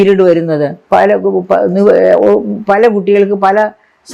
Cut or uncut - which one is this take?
uncut